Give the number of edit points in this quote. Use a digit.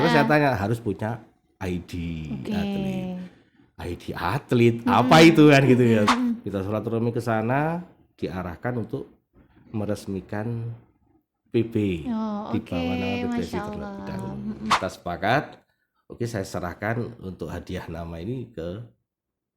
2